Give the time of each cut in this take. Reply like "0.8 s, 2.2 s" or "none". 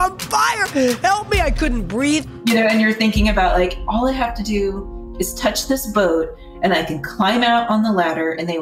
2.3 s